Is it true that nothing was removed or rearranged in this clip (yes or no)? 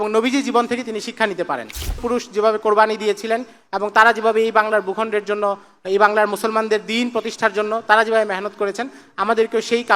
no